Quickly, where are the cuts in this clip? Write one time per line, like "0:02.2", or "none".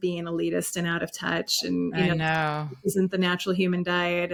none